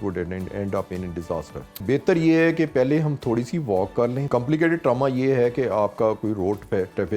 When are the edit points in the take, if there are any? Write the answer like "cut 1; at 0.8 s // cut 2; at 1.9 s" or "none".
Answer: cut 1; at 1.8 s // cut 2; at 4.3 s